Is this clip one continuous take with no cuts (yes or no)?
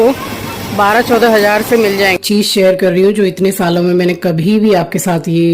no